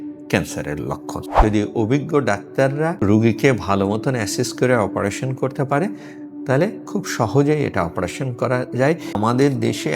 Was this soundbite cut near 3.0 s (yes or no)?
yes